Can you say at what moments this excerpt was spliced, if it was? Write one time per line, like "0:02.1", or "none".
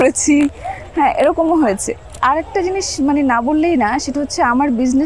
0:02.1